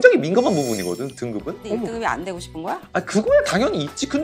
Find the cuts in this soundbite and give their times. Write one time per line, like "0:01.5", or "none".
0:01.6